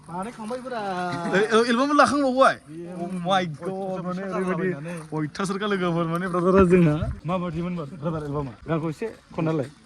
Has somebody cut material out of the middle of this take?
yes; 2 cuts; at 7.1 s, 8.6 s

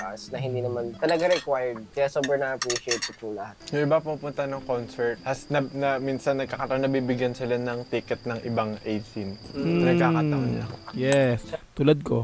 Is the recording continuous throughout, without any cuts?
no; 4 cuts; at 0.9 s, 1.8 s, 3.5 s, 5.2 s

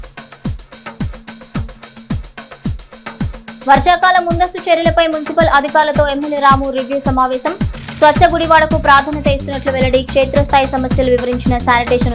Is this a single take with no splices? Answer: no; 1 cut; at 1.0 s

